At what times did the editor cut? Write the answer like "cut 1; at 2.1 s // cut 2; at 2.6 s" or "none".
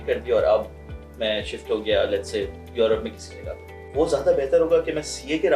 cut 1; at 3.8 s